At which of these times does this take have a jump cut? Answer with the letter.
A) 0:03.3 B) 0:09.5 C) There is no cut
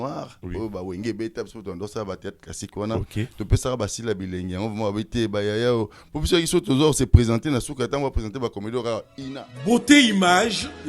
B